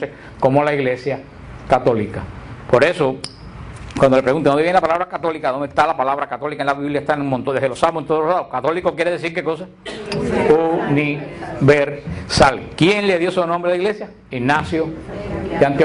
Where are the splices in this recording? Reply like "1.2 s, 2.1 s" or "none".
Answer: none